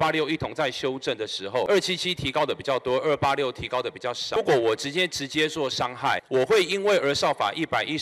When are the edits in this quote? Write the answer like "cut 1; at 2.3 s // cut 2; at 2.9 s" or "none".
cut 1; at 1.7 s // cut 2; at 4.4 s // cut 3; at 6.2 s